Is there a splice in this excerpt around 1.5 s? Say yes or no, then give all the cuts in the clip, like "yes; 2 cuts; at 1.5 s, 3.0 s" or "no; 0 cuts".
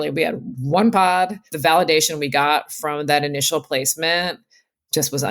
yes; 1 cut; at 1.5 s